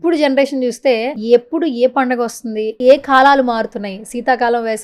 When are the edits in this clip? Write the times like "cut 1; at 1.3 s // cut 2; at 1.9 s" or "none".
cut 1; at 1.1 s // cut 2; at 2.7 s

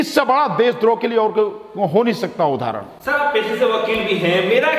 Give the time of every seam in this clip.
none

